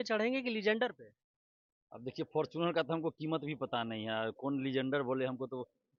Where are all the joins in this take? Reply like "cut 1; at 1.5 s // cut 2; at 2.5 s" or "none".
none